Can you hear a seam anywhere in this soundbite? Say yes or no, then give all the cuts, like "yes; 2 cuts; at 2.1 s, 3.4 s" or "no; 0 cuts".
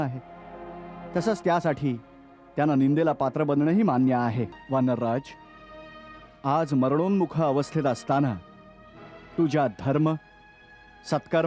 yes; 1 cut; at 4.5 s